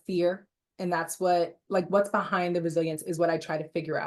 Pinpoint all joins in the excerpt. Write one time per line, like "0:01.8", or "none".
none